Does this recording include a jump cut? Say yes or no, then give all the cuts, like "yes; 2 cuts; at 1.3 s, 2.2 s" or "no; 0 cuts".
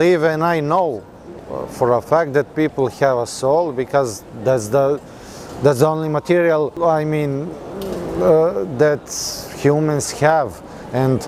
no; 0 cuts